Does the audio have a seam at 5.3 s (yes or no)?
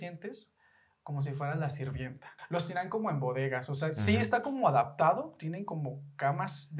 no